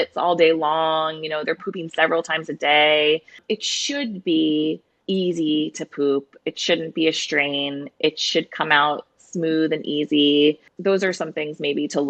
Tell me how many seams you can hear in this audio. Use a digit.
0